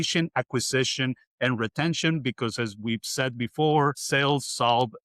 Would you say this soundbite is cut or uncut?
cut